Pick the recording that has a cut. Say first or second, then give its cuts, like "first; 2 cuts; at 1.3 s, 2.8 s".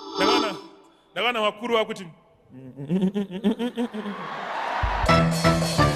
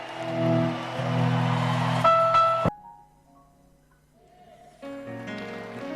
second; 1 cut; at 2.7 s